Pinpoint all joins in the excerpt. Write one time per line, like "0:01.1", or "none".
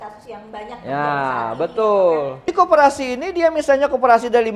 0:02.5